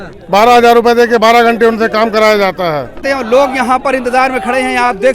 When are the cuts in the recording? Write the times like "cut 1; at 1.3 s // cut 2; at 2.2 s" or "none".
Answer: cut 1; at 3.0 s